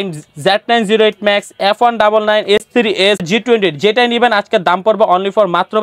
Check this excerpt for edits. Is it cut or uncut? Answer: uncut